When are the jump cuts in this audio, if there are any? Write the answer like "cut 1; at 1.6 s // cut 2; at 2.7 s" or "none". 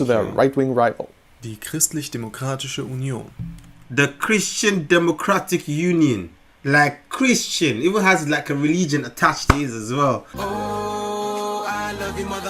cut 1; at 10.3 s